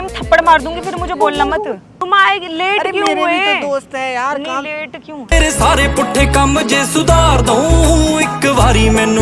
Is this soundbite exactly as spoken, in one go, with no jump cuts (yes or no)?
no